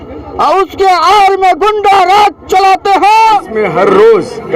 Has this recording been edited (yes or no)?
yes